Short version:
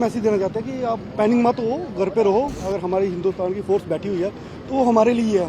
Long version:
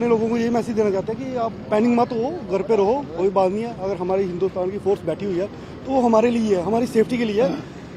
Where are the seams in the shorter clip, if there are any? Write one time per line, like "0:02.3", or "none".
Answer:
0:02.6